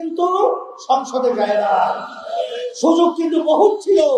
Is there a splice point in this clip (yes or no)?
no